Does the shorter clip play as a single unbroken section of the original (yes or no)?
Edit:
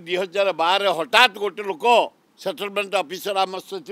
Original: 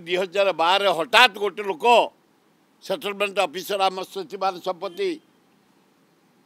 no